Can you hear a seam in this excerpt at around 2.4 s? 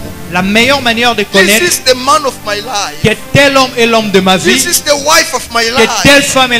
no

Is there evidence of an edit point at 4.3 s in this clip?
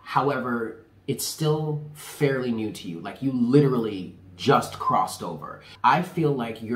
no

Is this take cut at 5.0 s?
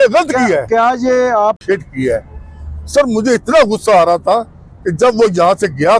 no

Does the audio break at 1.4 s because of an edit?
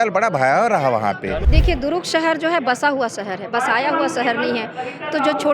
yes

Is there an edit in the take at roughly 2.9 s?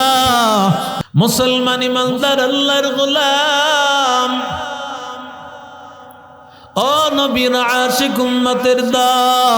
no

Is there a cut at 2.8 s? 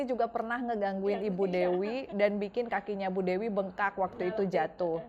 no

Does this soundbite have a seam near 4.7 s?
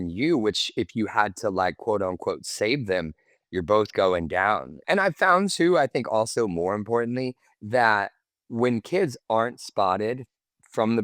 yes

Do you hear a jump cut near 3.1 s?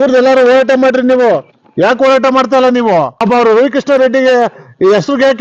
yes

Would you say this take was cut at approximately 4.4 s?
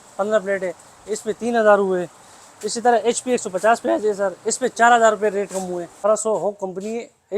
no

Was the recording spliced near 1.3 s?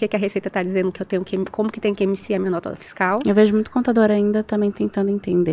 no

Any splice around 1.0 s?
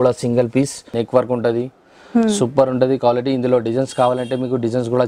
yes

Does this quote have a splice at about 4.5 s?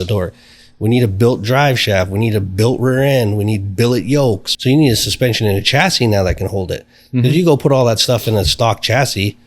yes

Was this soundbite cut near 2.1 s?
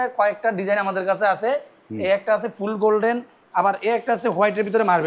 no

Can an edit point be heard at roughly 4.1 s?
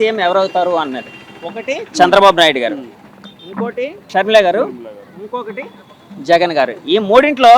yes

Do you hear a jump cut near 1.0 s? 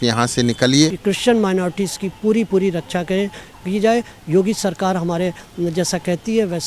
yes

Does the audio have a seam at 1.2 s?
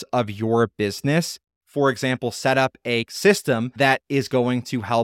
no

